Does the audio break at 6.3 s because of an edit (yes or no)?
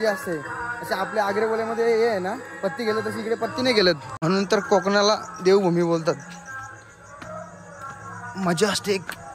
no